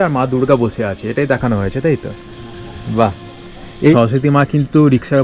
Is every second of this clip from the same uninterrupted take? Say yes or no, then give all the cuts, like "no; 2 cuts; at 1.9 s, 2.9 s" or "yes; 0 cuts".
no; 1 cut; at 3.9 s